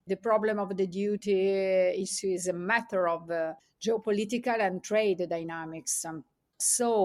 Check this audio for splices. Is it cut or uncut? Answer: uncut